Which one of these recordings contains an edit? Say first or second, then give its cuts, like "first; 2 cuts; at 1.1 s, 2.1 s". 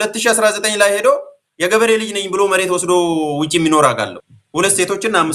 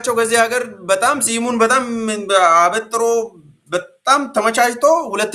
first; 1 cut; at 4.2 s